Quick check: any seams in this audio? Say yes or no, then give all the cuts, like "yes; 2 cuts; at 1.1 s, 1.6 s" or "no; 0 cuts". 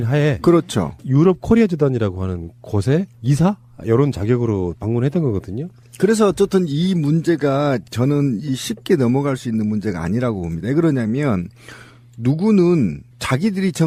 no; 0 cuts